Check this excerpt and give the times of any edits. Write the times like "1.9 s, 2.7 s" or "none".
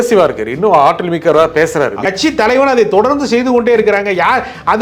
2.1 s